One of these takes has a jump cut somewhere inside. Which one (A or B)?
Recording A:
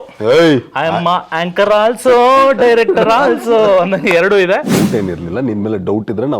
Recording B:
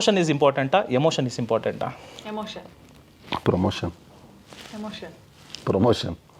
A